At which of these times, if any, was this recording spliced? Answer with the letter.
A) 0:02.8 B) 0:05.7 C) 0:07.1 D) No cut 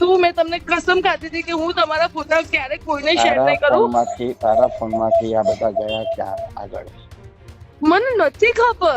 D